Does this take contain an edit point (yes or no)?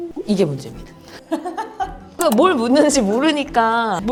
no